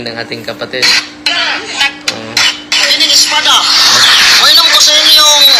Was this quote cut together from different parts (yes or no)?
no